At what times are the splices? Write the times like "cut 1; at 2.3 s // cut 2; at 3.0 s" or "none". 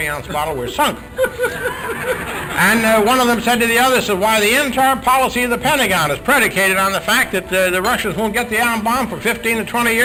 none